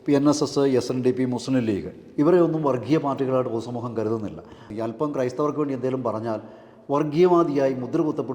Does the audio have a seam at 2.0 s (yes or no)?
no